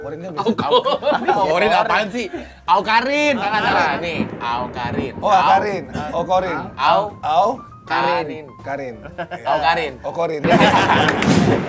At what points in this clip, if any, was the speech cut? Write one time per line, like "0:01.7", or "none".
0:03.4